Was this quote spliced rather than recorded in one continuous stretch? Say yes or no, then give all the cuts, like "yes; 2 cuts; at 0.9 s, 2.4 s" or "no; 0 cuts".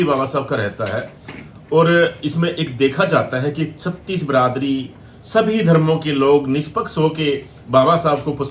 no; 0 cuts